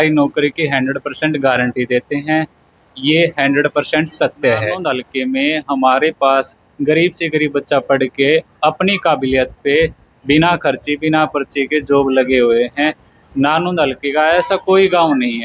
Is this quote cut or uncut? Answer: cut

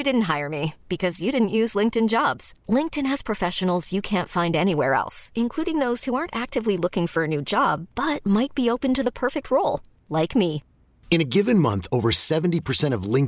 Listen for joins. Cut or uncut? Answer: uncut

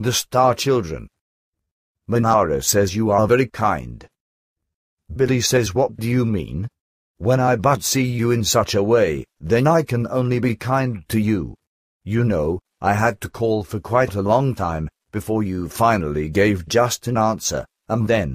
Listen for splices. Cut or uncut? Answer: uncut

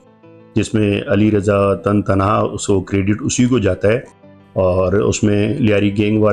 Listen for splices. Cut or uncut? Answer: uncut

